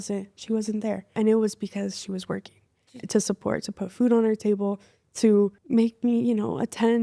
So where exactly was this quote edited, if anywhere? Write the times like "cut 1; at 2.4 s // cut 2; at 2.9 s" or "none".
cut 1; at 1.1 s // cut 2; at 5.6 s